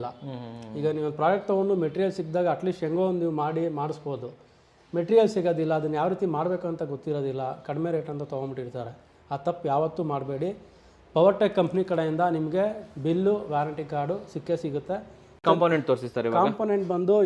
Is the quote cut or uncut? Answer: cut